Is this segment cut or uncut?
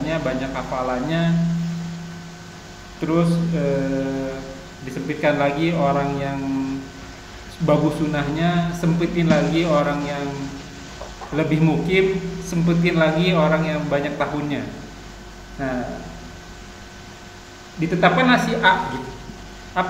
uncut